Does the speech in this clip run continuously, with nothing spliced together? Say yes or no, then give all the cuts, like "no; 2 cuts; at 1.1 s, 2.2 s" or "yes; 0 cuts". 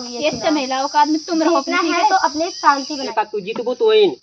no; 1 cut; at 3.0 s